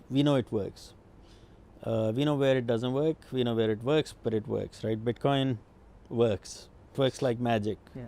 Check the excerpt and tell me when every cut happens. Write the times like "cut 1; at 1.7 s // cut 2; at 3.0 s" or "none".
cut 1; at 6.9 s

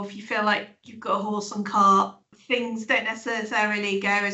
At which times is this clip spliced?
cut 1; at 2.3 s

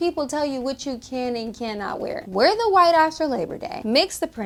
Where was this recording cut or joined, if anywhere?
none

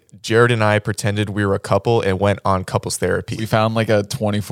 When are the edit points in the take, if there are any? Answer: cut 1; at 3.4 s

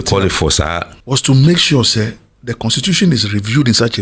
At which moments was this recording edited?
cut 1; at 0.9 s

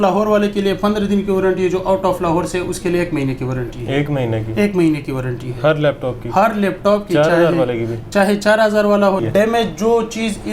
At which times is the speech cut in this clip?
cut 1; at 9.2 s

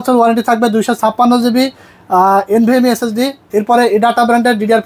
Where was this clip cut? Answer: none

